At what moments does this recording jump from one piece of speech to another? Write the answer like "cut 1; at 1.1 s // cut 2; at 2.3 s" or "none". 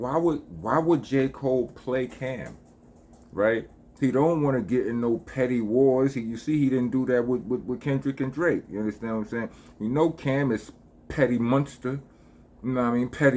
none